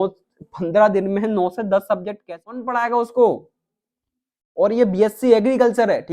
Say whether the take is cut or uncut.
cut